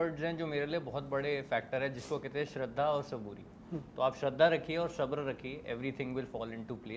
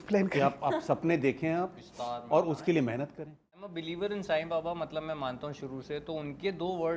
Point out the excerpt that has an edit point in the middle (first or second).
second